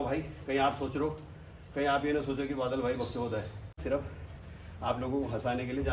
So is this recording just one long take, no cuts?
no; 1 cut; at 3.8 s

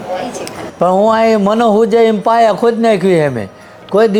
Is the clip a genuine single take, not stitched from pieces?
yes; 0 cuts

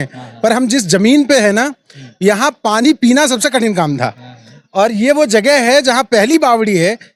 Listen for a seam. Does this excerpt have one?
no; 0 cuts

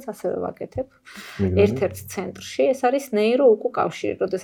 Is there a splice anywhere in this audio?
no; 0 cuts

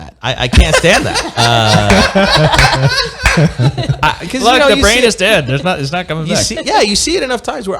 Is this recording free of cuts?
yes; 0 cuts

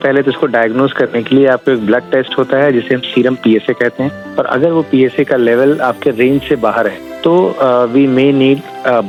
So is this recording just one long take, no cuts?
yes; 0 cuts

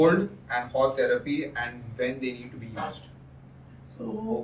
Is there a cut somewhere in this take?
no; 0 cuts

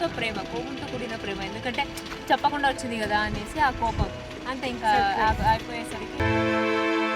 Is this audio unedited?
no; 1 cut; at 6.2 s

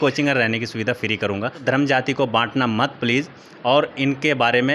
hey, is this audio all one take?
no; 1 cut; at 1.6 s

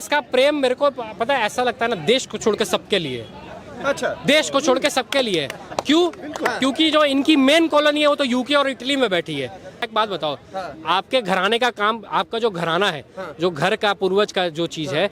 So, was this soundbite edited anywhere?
yes; 1 cut; at 9.9 s

